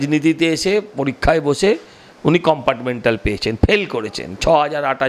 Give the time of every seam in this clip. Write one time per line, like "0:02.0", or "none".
none